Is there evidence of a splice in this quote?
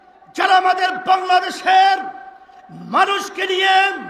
no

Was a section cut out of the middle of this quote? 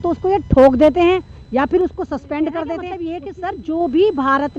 yes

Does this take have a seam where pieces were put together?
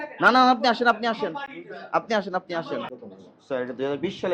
yes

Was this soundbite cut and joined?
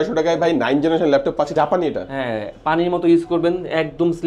yes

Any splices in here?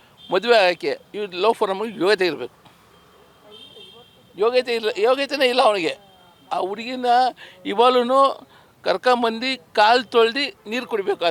no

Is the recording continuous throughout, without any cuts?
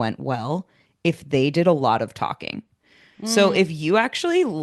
yes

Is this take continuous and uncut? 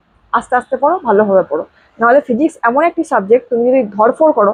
yes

